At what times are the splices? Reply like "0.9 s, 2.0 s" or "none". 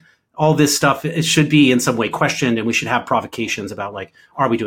none